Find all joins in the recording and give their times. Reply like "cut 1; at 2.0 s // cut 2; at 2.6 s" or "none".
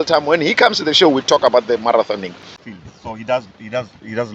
cut 1; at 2.6 s